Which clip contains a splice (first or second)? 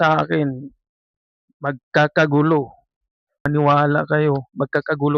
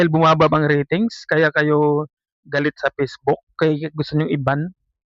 first